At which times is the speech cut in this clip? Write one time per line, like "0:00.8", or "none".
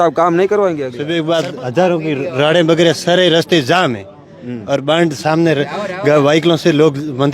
0:01.0